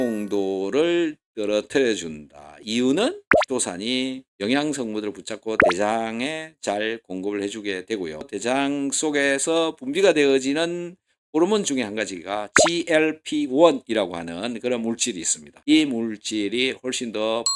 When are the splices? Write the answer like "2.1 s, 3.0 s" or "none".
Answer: 8.3 s